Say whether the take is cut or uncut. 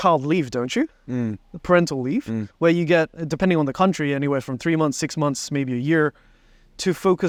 uncut